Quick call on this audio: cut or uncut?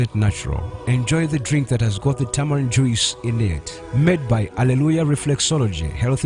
uncut